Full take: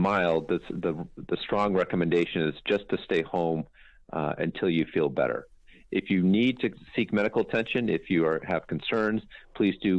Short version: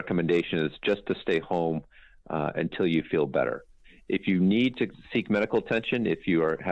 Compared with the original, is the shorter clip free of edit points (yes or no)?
yes